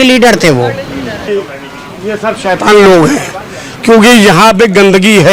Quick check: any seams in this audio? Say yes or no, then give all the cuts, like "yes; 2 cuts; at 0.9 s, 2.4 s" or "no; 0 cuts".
yes; 1 cut; at 1.2 s